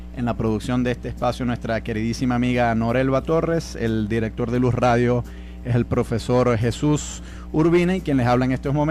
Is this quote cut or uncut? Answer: uncut